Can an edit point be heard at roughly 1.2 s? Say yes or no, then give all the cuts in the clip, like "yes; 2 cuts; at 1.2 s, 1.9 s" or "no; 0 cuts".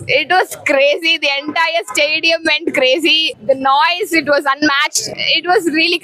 no; 2 cuts; at 3.3 s, 5.1 s